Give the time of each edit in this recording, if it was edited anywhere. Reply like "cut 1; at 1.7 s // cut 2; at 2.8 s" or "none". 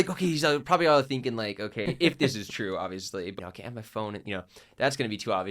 cut 1; at 1.8 s // cut 2; at 3.4 s